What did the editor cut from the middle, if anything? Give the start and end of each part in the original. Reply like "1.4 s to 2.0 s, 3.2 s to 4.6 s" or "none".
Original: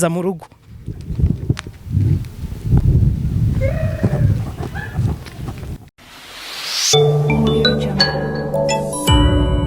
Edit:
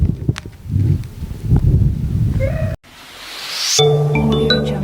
4.0 s to 5.9 s